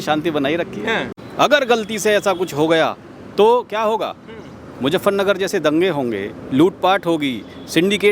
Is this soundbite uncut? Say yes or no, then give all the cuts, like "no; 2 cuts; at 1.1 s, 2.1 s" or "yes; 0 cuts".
no; 1 cut; at 1.2 s